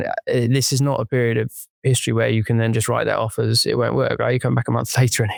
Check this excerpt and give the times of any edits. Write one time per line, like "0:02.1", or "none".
none

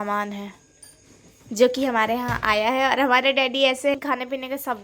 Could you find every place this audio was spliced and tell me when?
0:03.9

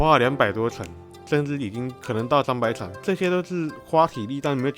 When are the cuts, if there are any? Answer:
0:02.0
0:03.0

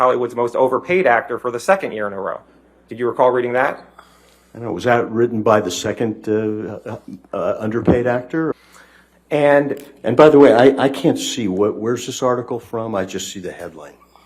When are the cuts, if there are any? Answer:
0:08.5

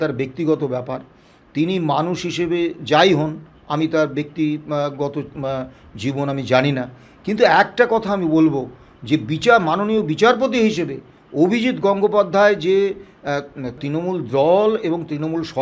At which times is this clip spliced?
0:13.8

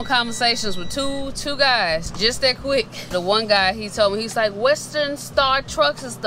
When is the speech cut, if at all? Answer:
0:02.1
0:03.1

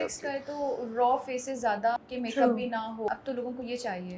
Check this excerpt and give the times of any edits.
0:02.0
0:03.1

